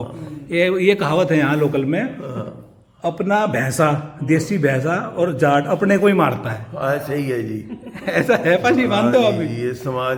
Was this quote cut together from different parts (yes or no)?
no